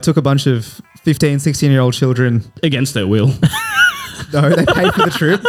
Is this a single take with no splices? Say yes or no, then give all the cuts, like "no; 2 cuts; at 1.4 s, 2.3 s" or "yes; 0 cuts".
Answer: yes; 0 cuts